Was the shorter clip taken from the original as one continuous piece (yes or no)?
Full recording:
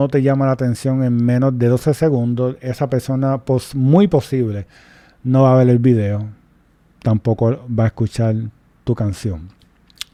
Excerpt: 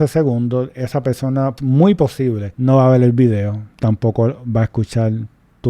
no